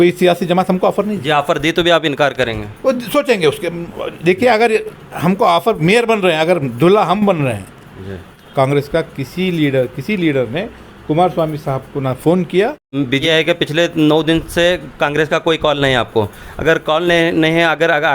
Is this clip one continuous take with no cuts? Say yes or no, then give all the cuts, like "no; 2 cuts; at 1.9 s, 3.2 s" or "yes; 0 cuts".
no; 2 cuts; at 8.4 s, 13.2 s